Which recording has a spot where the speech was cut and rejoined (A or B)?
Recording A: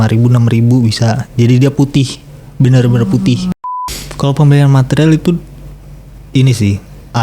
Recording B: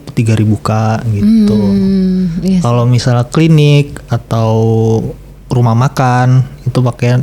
A